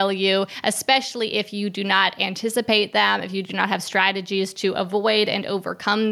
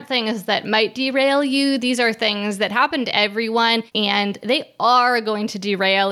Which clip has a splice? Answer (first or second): second